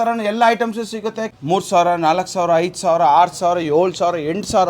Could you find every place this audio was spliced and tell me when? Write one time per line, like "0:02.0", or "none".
0:01.3